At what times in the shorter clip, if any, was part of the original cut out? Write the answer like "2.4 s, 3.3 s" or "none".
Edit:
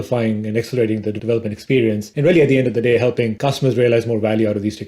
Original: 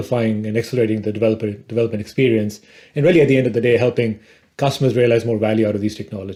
1.1 s, 2.1 s, 3.3 s